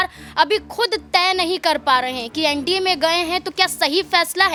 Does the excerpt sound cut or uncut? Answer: uncut